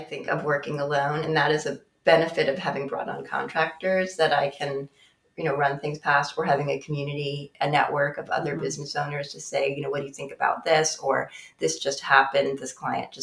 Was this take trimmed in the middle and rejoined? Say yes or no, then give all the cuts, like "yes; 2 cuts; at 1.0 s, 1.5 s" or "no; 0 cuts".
no; 0 cuts